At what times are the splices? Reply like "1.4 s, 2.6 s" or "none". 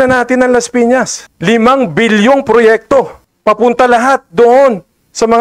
1.2 s, 3.2 s